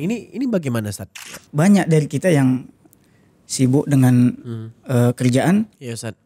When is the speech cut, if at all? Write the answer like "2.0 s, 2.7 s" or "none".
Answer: 1.4 s